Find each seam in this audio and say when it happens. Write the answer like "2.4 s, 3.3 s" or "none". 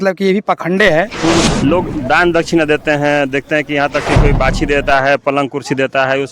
1.4 s